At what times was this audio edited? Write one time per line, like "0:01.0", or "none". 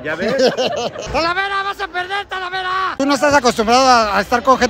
0:01.0
0:03.0